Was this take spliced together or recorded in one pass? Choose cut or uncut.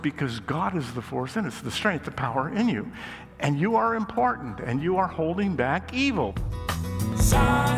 cut